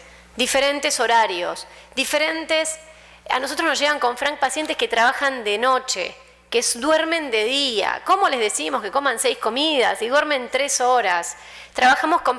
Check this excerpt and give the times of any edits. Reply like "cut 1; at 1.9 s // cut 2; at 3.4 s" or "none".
cut 1; at 5.6 s